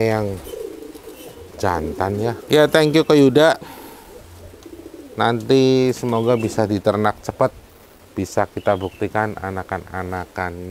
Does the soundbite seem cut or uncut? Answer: cut